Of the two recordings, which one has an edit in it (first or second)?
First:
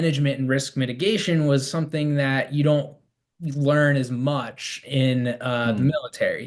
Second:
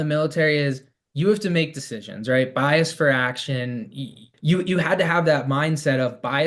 second